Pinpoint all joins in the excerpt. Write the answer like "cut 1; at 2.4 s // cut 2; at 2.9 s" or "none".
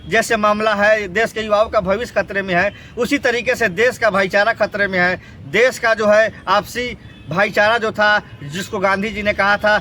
none